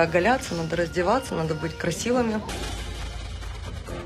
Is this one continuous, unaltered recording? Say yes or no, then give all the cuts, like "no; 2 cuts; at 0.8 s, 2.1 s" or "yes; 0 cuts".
no; 1 cut; at 2.5 s